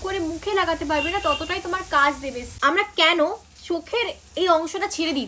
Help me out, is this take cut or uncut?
cut